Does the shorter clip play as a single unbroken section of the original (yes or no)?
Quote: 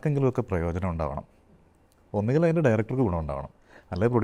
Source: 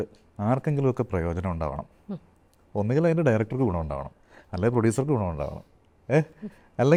yes